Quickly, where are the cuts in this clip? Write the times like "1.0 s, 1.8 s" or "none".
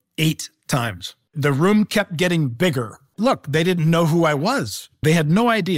1.2 s, 3.1 s